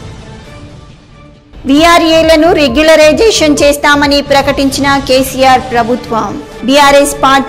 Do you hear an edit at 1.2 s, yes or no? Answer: yes